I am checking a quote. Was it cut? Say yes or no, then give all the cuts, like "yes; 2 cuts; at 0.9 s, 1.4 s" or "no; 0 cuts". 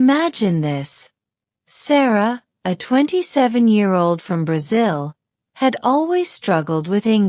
no; 0 cuts